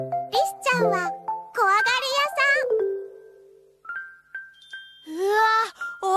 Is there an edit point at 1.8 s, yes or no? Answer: yes